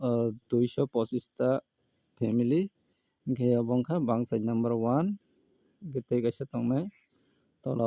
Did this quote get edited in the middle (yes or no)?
no